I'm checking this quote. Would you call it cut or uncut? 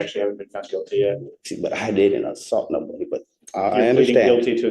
cut